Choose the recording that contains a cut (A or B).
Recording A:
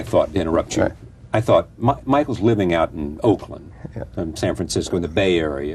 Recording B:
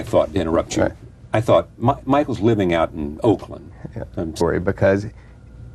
A